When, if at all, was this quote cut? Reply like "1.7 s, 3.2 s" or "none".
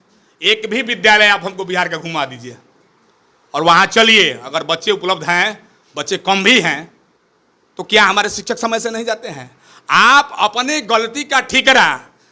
none